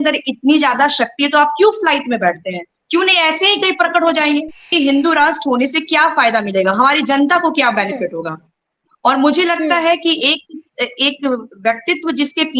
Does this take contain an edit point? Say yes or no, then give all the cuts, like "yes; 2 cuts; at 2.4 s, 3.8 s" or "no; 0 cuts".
yes; 1 cut; at 4.7 s